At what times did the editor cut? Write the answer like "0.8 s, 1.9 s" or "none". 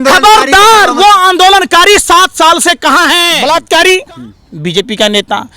3.3 s